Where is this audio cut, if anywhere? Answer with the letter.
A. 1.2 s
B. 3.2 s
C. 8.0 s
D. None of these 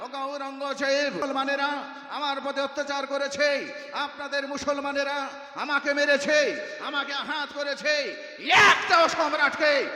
A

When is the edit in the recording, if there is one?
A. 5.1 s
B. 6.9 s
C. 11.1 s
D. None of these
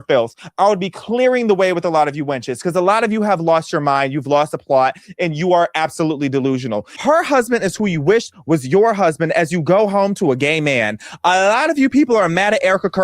B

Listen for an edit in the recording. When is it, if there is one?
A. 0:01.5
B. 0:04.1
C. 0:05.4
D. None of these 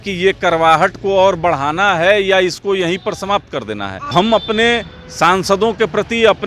B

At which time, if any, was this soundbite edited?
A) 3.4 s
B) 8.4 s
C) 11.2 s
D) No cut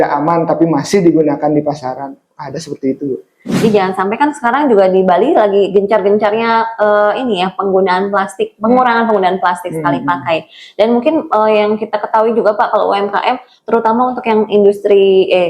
A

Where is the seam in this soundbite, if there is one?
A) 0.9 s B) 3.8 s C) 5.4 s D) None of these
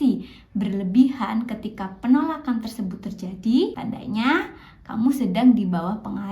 B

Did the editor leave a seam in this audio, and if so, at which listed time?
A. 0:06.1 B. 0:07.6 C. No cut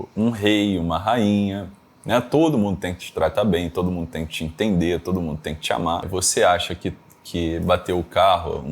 A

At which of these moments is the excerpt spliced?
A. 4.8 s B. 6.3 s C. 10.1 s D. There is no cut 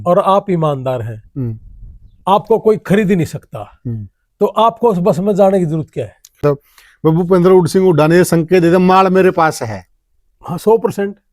B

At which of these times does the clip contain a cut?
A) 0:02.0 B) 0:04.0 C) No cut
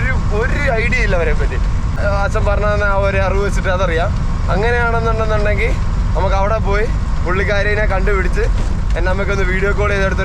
A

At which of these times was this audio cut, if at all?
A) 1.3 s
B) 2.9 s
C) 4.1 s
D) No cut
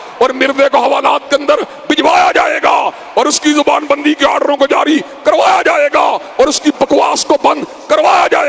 D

